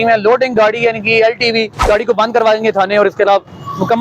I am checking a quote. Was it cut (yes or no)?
yes